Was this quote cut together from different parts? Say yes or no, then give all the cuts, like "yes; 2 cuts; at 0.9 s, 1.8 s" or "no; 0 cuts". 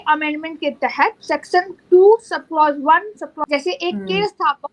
yes; 2 cuts; at 1.2 s, 3.4 s